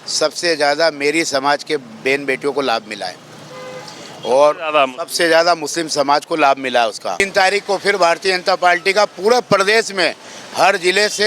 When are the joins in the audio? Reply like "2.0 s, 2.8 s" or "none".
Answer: 7.3 s